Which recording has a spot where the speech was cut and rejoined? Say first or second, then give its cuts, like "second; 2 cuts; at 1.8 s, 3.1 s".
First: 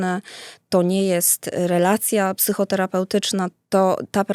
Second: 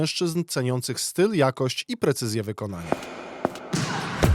second; 1 cut; at 2.8 s